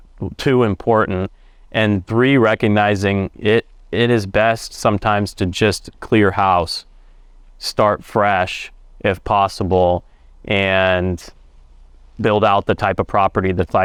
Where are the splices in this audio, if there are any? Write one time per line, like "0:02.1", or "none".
none